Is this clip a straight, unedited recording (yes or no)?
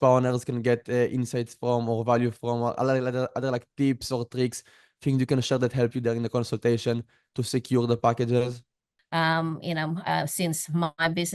no